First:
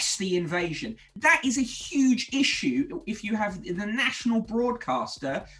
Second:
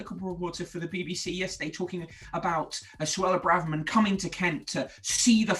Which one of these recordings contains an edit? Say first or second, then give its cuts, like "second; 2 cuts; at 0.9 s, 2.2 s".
first; 1 cut; at 1.0 s